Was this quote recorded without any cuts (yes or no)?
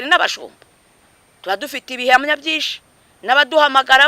yes